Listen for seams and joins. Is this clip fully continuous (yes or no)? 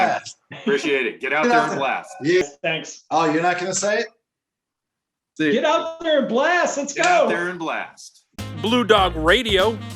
no